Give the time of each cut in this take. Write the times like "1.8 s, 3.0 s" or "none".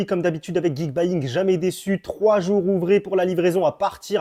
none